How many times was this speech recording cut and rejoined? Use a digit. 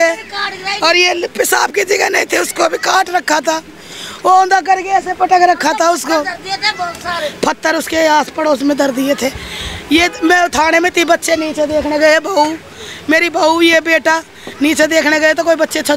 0